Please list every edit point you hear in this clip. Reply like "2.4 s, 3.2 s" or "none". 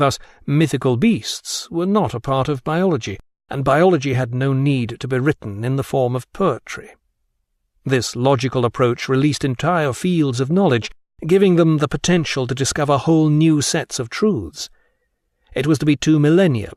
none